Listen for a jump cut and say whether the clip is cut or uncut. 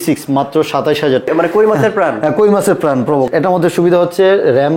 cut